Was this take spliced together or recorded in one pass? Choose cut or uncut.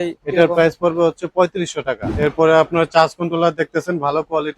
cut